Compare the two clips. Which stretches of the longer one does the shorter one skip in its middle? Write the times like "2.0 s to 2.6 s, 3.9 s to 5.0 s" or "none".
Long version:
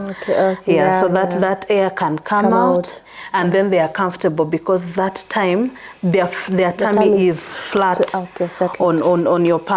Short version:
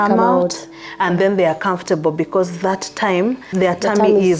5.8 s to 6.4 s